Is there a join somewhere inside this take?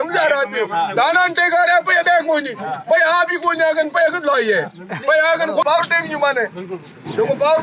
yes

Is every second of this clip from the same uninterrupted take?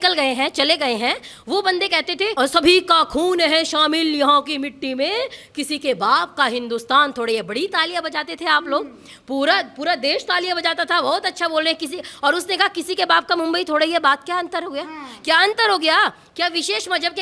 no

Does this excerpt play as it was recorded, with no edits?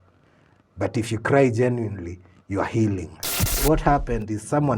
no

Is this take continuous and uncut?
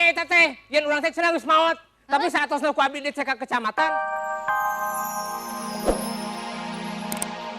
no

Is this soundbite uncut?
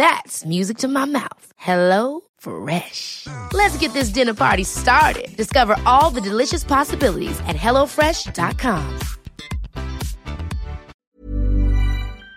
no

